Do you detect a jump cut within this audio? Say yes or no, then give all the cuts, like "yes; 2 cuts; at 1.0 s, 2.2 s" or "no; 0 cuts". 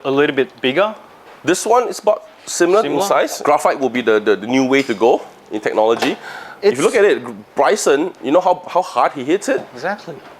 yes; 1 cut; at 3.4 s